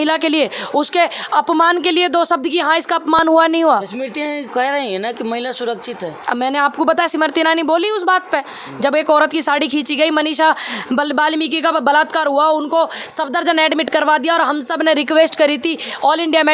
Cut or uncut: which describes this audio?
uncut